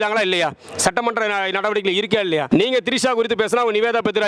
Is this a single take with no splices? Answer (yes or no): no